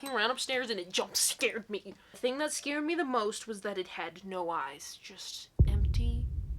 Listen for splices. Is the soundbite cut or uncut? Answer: cut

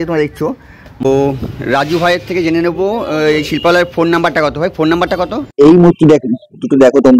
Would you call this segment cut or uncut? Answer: cut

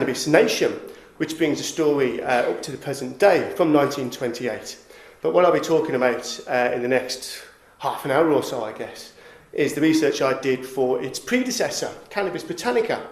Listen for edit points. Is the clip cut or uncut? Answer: uncut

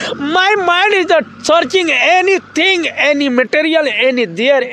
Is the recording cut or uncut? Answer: uncut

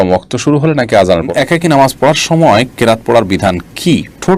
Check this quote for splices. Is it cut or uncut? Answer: cut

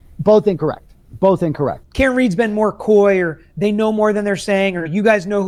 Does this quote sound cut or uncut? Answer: uncut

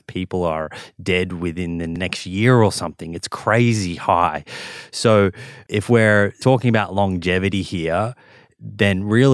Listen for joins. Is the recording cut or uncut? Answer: cut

